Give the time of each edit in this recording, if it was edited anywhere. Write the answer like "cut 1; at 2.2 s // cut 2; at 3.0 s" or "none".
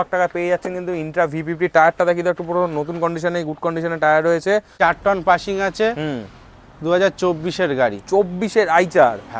cut 1; at 4.7 s